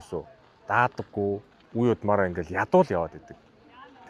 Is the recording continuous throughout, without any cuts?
no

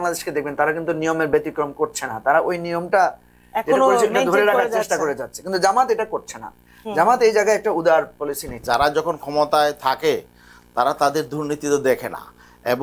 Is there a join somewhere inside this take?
yes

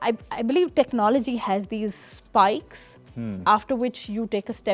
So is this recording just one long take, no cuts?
yes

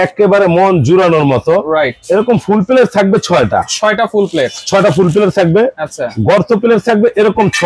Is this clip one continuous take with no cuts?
yes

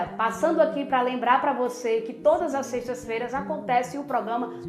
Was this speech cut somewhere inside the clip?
no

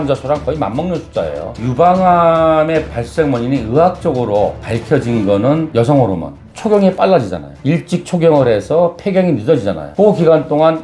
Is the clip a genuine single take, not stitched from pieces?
no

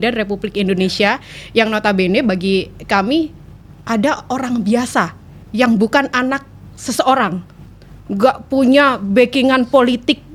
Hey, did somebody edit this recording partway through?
no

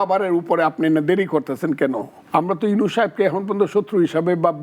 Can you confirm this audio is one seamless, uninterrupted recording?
no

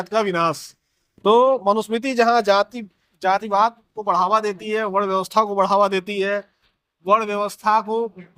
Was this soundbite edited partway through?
no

